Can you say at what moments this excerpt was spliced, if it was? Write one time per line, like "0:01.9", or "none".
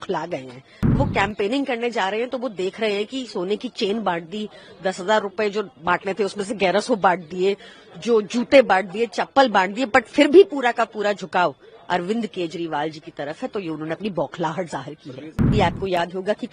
0:01.0
0:15.5